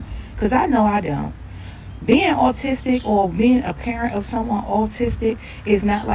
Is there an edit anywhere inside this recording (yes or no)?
no